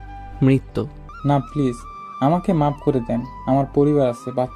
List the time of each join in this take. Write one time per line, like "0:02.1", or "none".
0:01.0